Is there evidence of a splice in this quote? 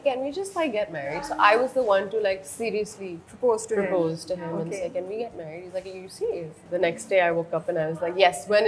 yes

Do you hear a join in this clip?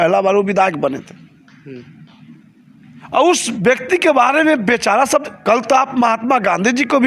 no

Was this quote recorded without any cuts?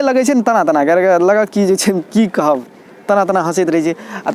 yes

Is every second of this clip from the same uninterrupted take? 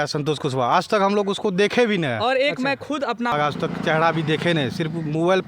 no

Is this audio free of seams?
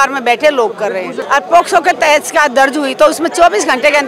no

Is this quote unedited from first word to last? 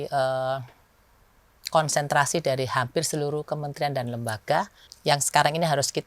no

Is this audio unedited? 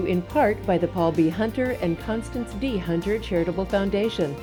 yes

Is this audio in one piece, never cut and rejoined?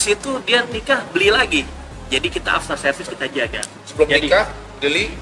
yes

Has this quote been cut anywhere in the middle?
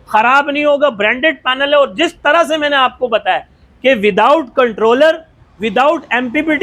no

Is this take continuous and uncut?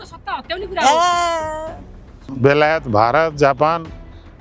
no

